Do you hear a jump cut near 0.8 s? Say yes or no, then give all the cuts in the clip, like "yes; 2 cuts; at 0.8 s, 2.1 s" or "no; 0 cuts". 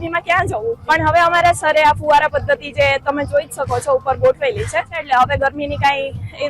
yes; 2 cuts; at 0.8 s, 4.9 s